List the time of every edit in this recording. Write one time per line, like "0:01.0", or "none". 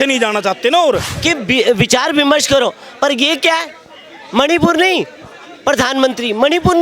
0:01.1